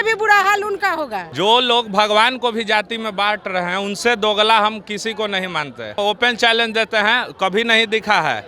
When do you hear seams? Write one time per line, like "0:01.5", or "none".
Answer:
0:01.2
0:06.0